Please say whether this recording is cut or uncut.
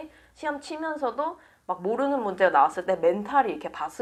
uncut